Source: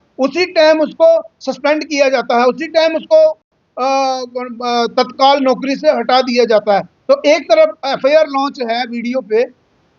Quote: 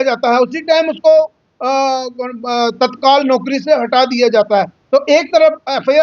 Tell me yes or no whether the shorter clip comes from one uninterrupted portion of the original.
no